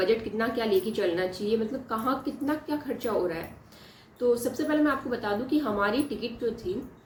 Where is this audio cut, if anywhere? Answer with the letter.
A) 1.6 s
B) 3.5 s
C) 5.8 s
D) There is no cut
D